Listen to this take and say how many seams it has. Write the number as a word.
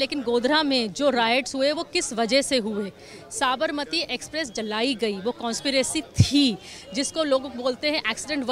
zero